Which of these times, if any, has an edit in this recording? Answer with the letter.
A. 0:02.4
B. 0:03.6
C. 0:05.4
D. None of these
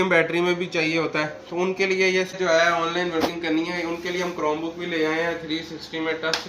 A